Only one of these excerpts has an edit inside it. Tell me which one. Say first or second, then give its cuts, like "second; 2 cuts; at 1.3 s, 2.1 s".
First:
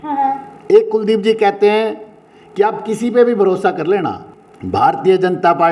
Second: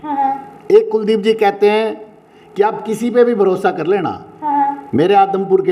first; 1 cut; at 4.3 s